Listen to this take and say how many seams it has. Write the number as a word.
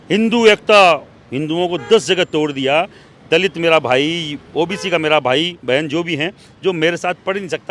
zero